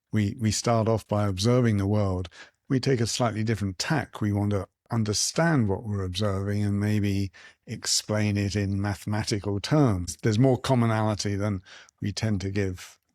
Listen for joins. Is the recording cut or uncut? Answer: cut